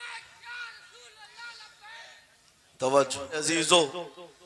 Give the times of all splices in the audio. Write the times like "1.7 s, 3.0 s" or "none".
3.5 s